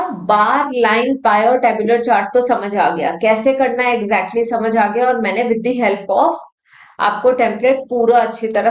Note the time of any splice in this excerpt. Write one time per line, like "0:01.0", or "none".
none